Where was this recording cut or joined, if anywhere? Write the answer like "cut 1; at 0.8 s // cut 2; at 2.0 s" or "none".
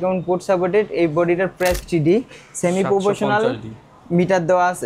cut 1; at 1.8 s